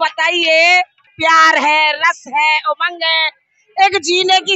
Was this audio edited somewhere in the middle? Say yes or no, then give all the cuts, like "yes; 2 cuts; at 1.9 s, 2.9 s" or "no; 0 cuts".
yes; 1 cut; at 1.1 s